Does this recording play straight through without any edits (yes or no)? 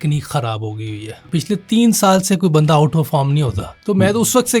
no